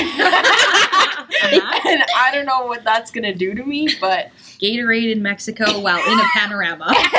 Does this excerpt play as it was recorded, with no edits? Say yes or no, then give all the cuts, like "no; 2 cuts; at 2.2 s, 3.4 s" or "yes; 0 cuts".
no; 1 cut; at 4.4 s